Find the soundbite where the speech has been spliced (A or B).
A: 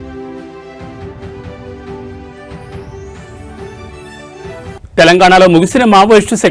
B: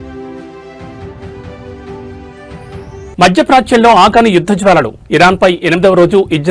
A